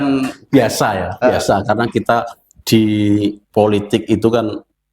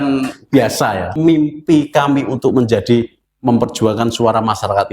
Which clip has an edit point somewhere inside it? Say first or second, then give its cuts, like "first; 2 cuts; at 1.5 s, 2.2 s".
second; 1 cut; at 1.1 s